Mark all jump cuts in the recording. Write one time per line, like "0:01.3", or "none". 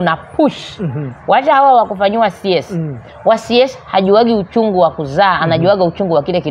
none